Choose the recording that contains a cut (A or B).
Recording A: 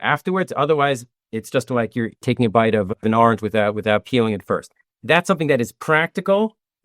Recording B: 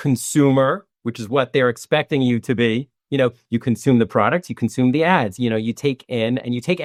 A